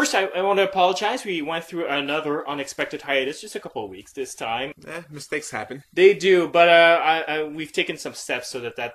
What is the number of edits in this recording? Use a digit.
0